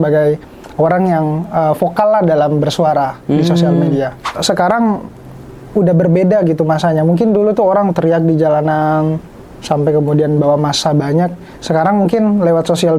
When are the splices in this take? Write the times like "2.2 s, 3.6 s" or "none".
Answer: 4.3 s